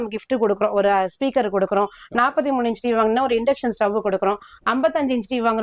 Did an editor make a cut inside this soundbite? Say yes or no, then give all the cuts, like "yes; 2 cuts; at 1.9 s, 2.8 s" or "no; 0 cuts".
no; 0 cuts